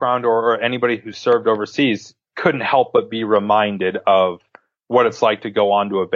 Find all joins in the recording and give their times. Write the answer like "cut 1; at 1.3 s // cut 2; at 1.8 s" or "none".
cut 1; at 2.1 s